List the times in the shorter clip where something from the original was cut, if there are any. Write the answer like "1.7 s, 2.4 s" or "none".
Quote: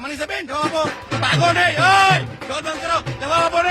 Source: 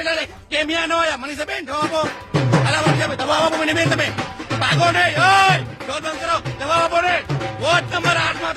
1.0 s